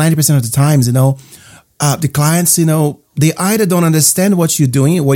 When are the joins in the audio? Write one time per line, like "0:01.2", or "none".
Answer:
none